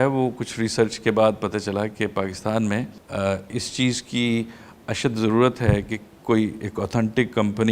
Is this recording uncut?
no; 1 cut; at 3.0 s

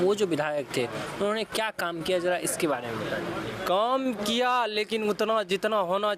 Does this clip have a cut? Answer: no; 0 cuts

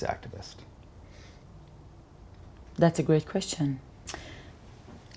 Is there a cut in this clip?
no; 0 cuts

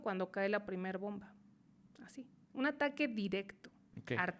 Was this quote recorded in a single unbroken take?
yes; 0 cuts

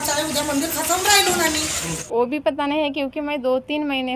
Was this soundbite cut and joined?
yes; 1 cut; at 1.8 s

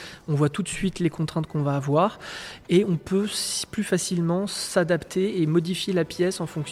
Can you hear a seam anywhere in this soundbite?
no; 0 cuts

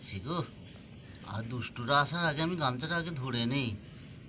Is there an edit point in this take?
no; 0 cuts

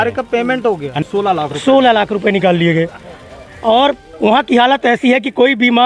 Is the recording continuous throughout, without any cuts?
no; 1 cut; at 1.0 s

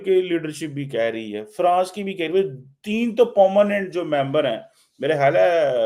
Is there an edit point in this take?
no; 0 cuts

